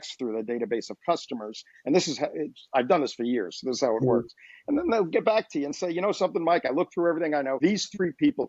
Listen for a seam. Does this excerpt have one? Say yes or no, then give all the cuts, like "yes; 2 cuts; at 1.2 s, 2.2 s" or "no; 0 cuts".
yes; 1 cut; at 7.6 s